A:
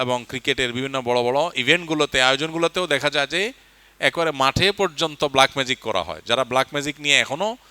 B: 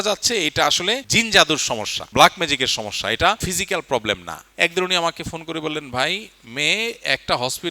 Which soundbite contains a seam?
B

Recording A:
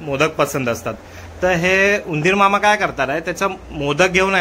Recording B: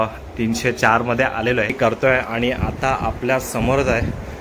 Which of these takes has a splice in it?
B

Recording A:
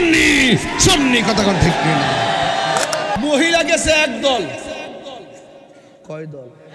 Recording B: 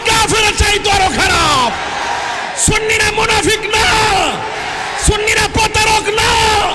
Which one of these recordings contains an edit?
A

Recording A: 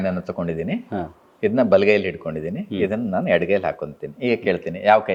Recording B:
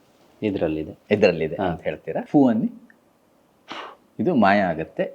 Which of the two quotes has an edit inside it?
B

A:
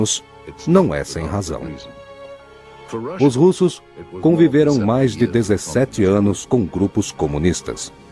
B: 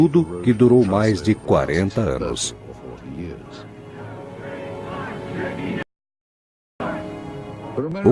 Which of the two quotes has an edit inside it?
B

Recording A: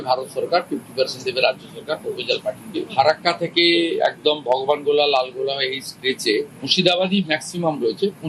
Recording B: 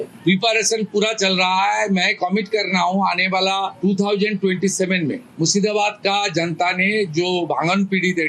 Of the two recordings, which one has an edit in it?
A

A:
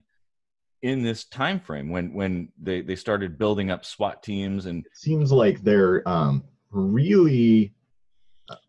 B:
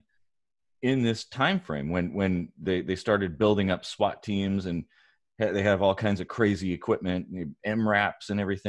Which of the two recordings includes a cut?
A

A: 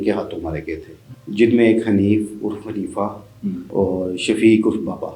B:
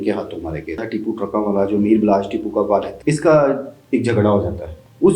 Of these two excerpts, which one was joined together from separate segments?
B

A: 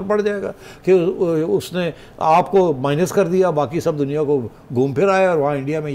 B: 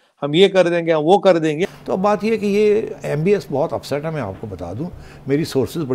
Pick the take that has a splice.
B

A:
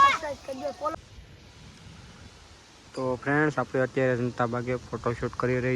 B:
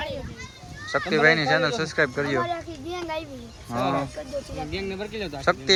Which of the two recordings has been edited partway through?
A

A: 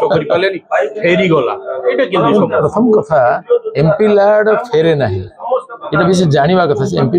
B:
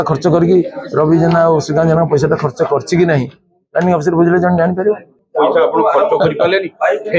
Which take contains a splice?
B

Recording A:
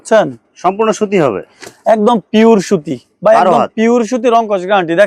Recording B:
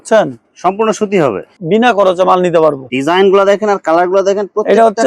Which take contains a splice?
B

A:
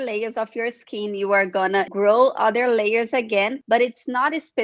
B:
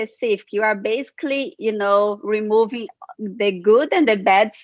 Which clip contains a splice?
A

